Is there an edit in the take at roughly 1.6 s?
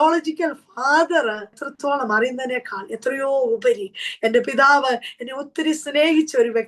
yes; 1 cut; at 1.6 s

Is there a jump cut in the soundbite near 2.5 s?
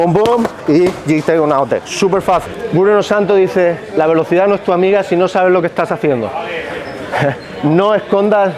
yes; 1 cut; at 2.5 s

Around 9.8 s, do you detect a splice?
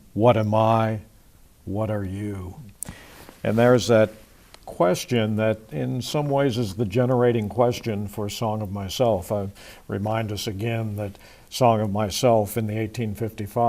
yes; 1 cut; at 9.8 s

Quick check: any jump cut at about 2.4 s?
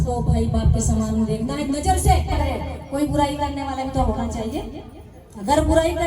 yes; 1 cut; at 2.4 s

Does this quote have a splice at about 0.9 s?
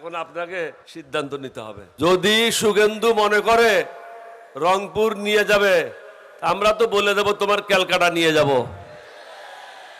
yes; 2 cuts; at 0.9 s, 1.8 s

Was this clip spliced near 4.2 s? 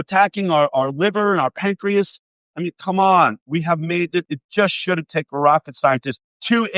yes; 1 cut; at 4.2 s

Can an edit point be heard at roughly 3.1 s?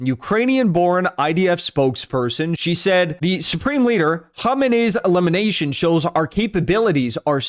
yes; 2 cuts; at 2.6 s, 3.1 s

